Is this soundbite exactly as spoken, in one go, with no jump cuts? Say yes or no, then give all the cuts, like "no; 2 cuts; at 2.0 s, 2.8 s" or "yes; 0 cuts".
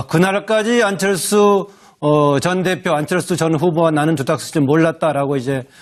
yes; 0 cuts